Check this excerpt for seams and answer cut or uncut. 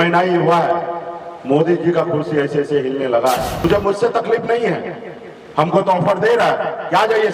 cut